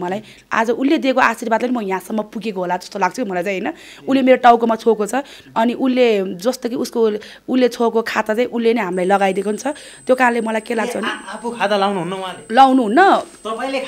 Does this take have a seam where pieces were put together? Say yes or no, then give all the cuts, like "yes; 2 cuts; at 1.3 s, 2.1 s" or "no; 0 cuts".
no; 0 cuts